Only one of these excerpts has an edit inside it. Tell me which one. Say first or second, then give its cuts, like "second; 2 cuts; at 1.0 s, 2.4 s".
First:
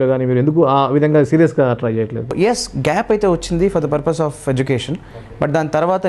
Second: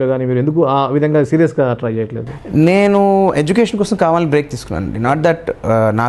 first; 1 cut; at 2.3 s